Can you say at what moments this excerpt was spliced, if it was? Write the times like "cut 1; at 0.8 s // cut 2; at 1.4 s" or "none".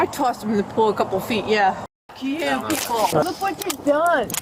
cut 1; at 1.9 s // cut 2; at 3.2 s